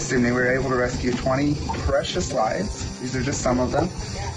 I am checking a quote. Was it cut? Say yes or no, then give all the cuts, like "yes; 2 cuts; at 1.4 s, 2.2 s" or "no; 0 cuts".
no; 0 cuts